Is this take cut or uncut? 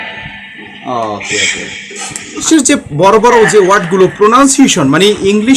cut